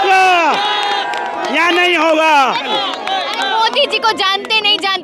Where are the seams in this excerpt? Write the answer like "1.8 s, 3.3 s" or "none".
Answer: 2.7 s